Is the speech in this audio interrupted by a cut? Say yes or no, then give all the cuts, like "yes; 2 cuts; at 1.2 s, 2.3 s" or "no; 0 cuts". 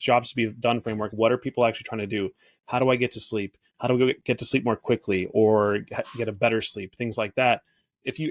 no; 0 cuts